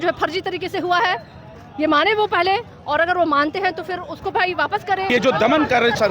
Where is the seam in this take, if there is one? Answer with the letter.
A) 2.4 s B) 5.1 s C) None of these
B